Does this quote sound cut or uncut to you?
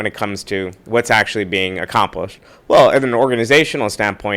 uncut